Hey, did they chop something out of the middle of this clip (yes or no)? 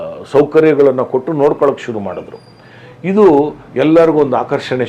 no